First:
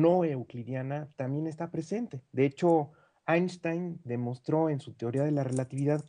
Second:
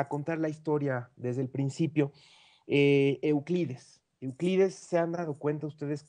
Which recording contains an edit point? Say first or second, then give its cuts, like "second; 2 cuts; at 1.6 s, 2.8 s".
first; 1 cut; at 3.4 s